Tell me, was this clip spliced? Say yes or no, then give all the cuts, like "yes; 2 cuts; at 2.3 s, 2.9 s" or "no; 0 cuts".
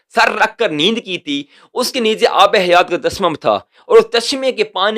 no; 0 cuts